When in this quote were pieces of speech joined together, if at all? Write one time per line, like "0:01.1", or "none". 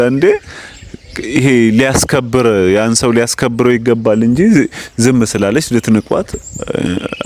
none